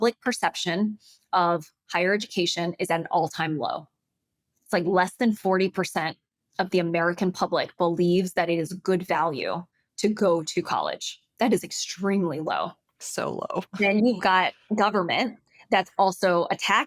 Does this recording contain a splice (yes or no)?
no